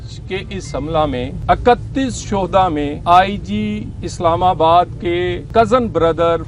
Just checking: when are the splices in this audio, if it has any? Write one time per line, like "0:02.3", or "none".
0:01.4
0:03.0
0:05.4